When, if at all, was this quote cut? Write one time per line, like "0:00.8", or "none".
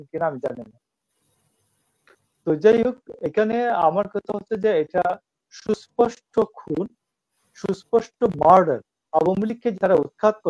0:09.0